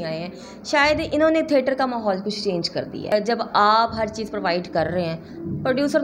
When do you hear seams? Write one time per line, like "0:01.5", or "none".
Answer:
0:03.1